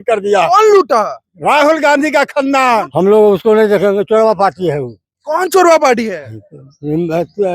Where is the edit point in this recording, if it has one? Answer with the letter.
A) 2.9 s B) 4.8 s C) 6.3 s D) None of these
A